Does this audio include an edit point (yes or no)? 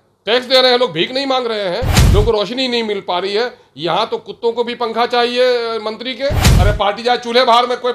yes